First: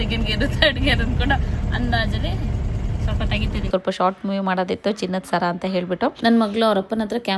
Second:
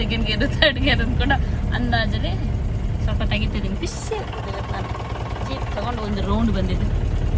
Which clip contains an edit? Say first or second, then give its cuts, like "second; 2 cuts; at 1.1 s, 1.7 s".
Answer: first; 2 cuts; at 3.7 s, 6.2 s